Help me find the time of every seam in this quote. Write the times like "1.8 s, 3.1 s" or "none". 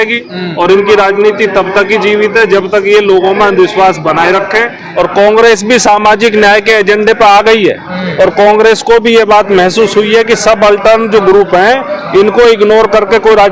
4.8 s